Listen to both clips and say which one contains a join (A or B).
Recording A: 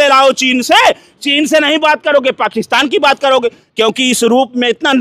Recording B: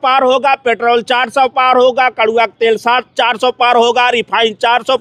A